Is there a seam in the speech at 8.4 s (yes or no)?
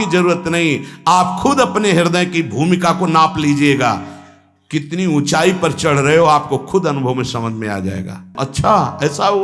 yes